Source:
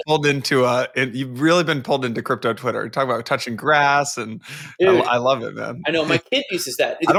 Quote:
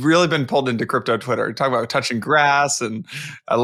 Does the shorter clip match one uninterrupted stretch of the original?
yes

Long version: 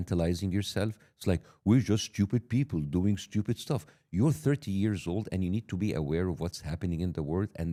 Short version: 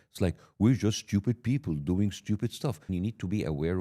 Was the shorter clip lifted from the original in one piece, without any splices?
no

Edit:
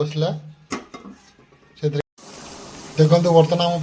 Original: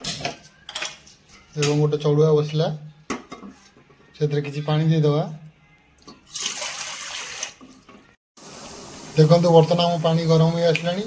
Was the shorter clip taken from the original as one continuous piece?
no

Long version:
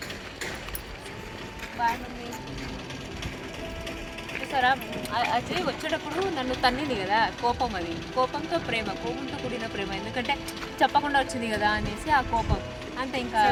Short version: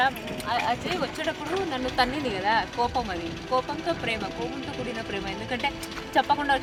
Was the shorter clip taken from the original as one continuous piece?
yes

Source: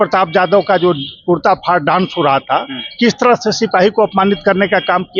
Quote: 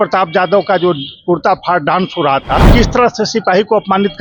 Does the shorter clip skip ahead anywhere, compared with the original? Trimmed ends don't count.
yes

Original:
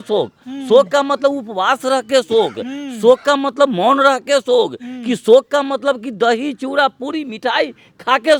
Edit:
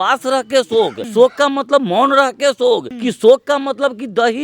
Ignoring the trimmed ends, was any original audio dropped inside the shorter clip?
yes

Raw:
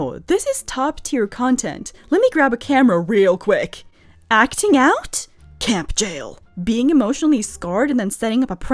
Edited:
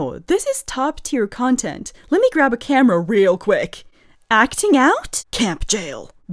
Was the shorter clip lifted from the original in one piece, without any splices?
no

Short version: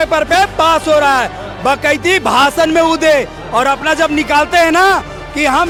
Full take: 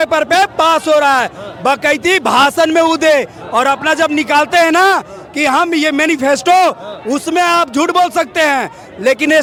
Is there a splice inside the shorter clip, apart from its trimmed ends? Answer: no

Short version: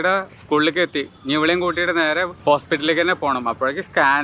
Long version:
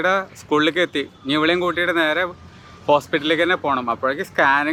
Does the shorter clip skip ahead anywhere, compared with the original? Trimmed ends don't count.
yes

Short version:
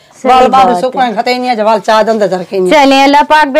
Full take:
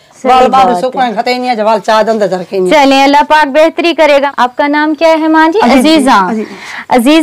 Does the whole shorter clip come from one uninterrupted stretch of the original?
yes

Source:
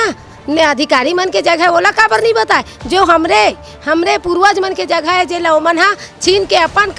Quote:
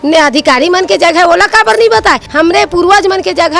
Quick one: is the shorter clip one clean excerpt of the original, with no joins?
no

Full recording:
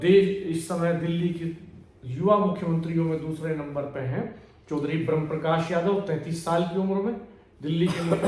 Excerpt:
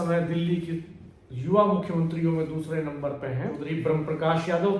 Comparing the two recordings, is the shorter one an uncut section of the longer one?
no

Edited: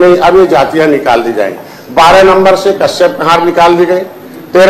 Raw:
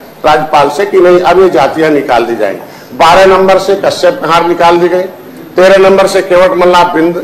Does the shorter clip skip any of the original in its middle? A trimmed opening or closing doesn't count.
no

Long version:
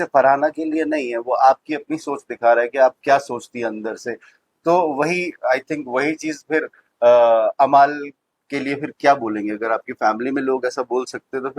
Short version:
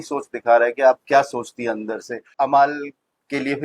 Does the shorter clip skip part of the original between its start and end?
yes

